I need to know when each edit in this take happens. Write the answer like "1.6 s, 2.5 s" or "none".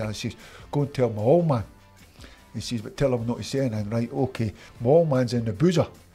4.6 s